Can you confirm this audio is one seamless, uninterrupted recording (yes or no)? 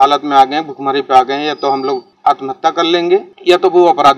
no